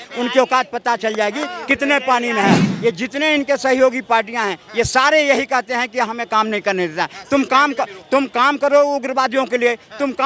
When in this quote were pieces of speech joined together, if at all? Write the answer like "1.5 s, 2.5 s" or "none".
2.7 s